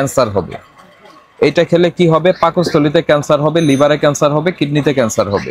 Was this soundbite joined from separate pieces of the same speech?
no; 0 cuts

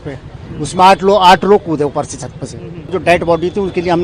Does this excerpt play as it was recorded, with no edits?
no; 1 cut; at 2.9 s

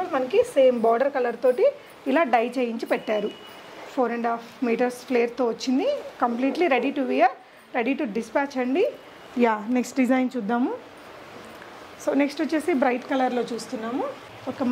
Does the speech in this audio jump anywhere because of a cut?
no; 0 cuts

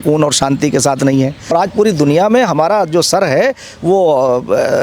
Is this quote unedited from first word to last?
no; 1 cut; at 1.5 s

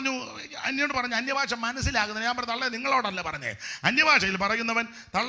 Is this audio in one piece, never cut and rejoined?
yes; 0 cuts

